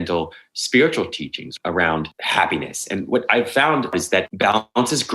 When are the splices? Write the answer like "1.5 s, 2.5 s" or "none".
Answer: 1.4 s, 2.2 s, 3.9 s